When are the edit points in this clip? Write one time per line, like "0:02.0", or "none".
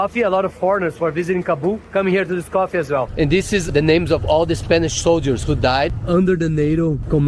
0:03.1